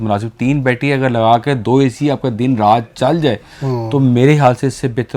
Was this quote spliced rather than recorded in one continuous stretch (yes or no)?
no